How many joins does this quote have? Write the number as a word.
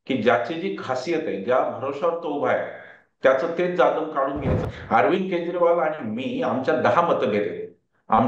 one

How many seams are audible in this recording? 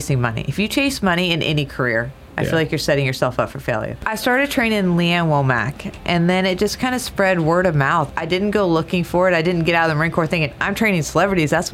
two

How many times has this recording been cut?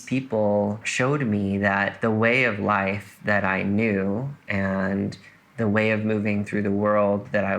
two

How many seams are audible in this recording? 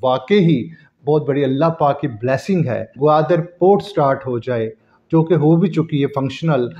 one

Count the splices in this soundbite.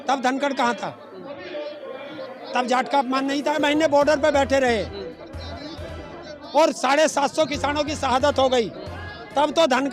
one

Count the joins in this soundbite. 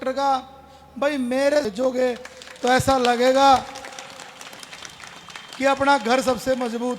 one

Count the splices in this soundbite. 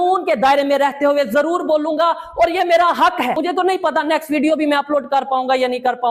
one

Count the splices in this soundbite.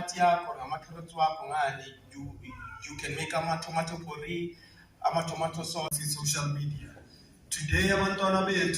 one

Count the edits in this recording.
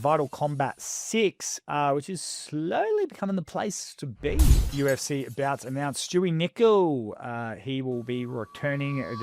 one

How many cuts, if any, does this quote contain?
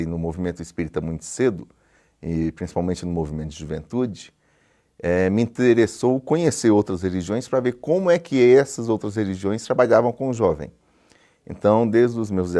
one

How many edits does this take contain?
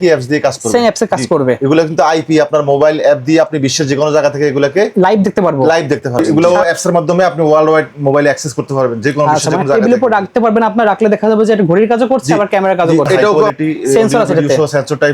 two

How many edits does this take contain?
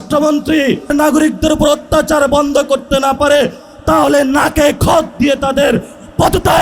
one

